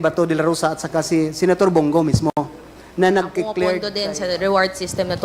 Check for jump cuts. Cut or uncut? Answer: cut